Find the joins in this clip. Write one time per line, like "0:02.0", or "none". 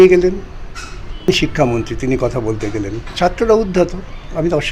0:01.3